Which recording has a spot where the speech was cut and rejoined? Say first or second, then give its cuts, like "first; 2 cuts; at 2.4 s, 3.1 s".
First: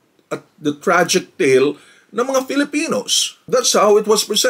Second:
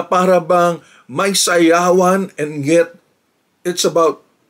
first; 1 cut; at 3.3 s